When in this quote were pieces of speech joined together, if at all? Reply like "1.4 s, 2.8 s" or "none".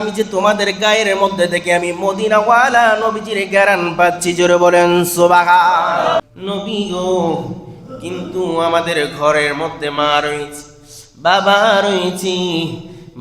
6.2 s

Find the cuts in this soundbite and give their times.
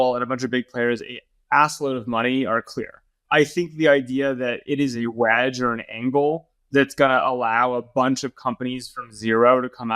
3.2 s

